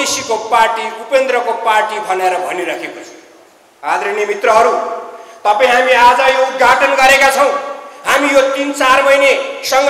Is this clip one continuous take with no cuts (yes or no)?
yes